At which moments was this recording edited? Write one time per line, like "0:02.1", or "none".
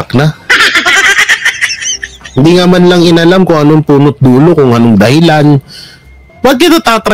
0:06.1